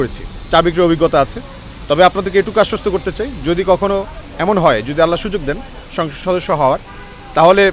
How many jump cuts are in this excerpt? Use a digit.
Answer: 1